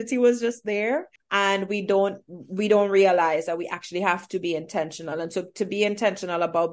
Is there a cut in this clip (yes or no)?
yes